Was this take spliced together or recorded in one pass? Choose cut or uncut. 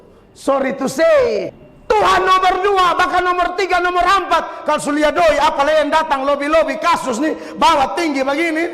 cut